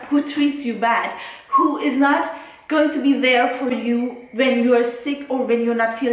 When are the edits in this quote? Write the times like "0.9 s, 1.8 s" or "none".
3.7 s

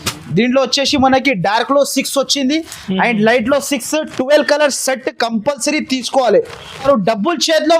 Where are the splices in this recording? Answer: 6.8 s

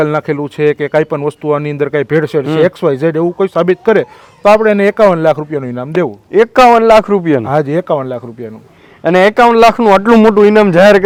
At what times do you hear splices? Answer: none

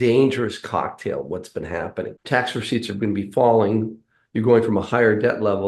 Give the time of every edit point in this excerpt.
2.2 s

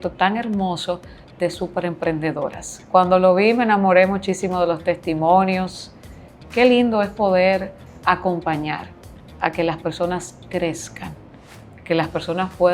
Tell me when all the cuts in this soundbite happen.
none

